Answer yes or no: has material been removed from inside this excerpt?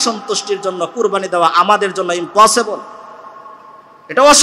no